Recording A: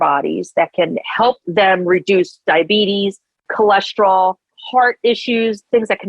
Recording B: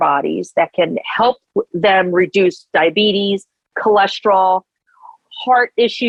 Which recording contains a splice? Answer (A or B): A